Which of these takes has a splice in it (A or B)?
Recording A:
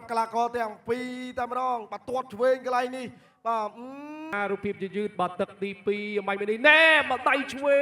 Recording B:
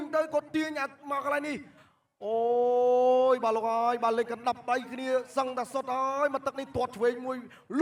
A